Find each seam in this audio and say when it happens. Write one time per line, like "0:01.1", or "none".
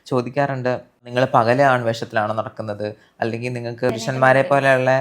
0:01.1